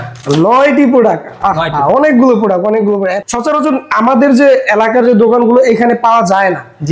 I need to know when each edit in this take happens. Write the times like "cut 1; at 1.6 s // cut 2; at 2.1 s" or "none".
cut 1; at 3.1 s